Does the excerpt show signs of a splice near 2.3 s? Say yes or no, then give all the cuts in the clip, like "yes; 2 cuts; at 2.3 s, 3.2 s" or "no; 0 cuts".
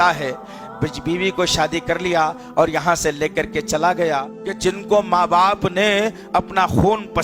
no; 1 cut; at 4.4 s